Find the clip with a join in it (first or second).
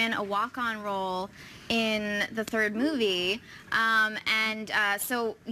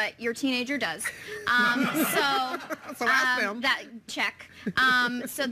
first